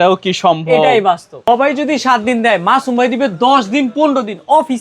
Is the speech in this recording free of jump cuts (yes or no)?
no